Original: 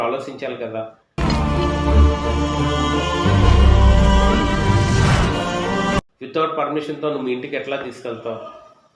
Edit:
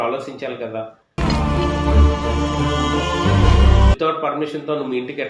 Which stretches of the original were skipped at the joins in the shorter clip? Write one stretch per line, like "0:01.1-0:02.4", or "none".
0:03.9-0:06.3